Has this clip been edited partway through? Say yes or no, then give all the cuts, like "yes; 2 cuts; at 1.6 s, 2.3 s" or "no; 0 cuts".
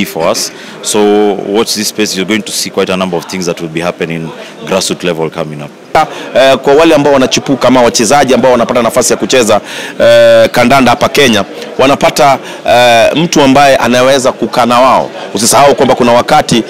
yes; 1 cut; at 5.9 s